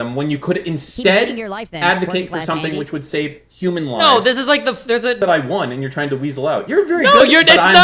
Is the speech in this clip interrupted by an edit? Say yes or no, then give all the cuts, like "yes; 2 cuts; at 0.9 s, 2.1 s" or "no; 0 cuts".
yes; 1 cut; at 5.2 s